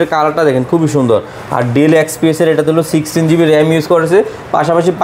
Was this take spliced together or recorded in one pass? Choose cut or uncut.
uncut